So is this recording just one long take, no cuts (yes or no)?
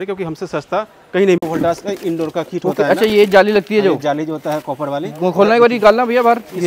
no